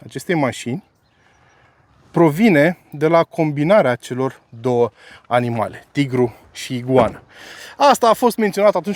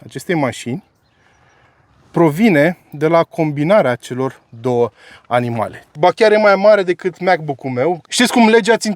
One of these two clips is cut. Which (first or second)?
second